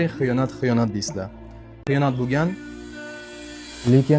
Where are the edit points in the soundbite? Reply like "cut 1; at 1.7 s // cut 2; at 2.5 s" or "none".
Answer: cut 1; at 1.8 s